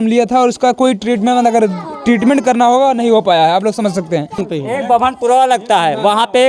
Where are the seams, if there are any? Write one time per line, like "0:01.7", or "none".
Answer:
0:04.5